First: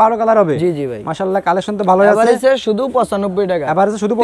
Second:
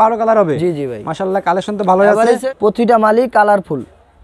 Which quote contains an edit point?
second; 1 cut; at 2.5 s

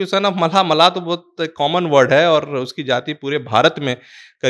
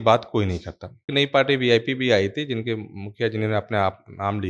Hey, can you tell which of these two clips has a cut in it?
second; 1 cut; at 1.1 s

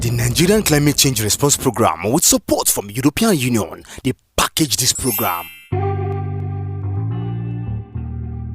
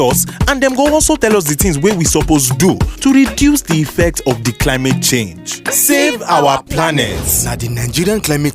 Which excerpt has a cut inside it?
first; 1 cut; at 5.5 s

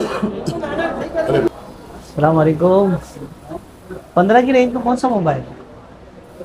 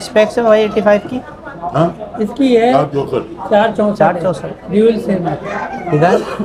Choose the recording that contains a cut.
first; 1 cut; at 1.5 s

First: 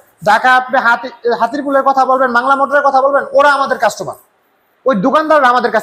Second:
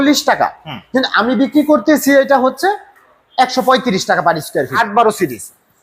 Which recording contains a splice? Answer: second; 1 cut; at 4.7 s

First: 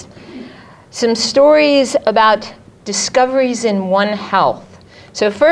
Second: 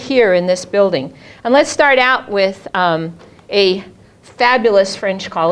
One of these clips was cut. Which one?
second; 1 cut; at 0.9 s

